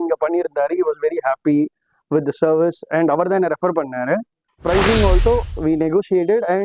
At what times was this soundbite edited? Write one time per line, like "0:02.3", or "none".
0:04.5